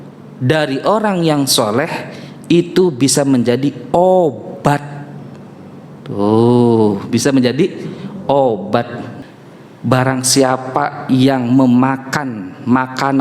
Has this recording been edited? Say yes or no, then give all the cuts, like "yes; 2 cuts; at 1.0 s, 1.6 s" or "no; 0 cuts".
yes; 1 cut; at 9.1 s